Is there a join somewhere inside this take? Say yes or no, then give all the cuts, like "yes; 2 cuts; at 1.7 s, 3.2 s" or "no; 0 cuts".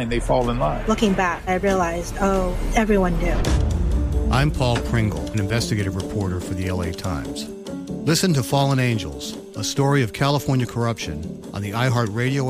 no; 0 cuts